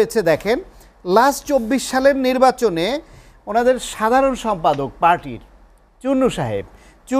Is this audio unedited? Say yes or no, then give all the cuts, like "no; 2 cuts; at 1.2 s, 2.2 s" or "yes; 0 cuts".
yes; 0 cuts